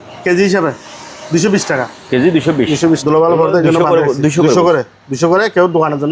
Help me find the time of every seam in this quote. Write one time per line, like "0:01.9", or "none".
0:03.0

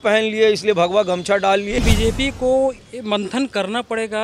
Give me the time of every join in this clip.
0:01.8

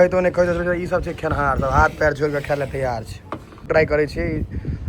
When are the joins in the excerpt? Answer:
0:03.7

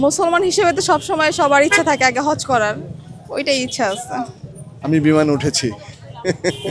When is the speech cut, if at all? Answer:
none

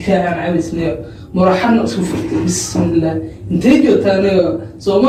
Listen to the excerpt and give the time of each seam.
none

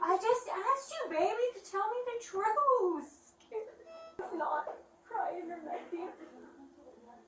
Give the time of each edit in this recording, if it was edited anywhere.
0:04.1

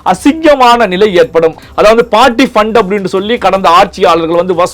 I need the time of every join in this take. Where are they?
0:01.6

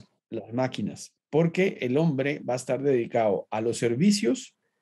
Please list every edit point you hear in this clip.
0:01.1

